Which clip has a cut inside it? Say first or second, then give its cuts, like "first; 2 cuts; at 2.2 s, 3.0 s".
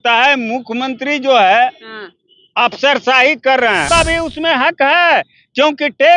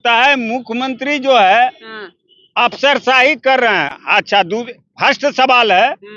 first; 1 cut; at 3.8 s